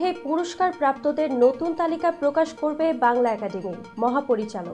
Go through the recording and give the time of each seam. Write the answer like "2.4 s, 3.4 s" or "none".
none